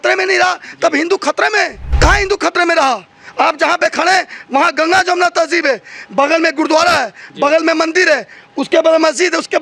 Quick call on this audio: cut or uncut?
cut